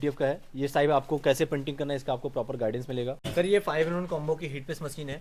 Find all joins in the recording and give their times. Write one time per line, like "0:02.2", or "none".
0:03.2